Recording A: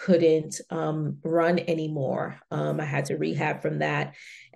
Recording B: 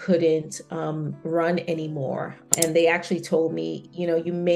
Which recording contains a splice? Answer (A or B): B